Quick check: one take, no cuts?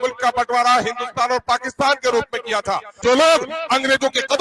no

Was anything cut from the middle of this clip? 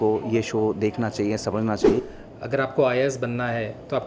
yes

